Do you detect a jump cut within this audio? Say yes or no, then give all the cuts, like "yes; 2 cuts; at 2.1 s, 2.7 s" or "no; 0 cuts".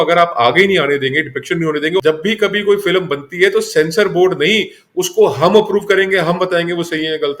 yes; 1 cut; at 2.0 s